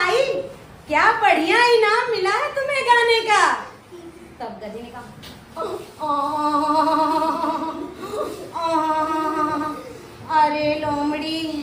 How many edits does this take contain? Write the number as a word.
zero